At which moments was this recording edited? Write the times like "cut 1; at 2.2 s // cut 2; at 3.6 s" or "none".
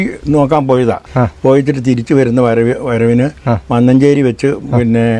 cut 1; at 1.1 s